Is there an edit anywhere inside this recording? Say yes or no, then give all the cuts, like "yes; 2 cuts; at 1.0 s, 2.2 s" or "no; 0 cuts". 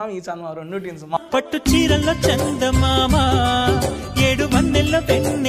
yes; 1 cut; at 1.2 s